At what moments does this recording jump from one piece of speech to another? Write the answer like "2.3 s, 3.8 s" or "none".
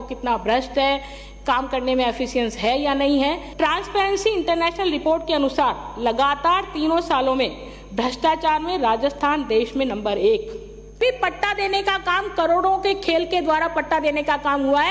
3.5 s, 11.0 s